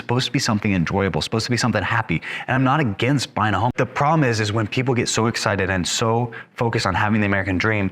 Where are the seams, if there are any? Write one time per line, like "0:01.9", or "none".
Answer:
0:03.7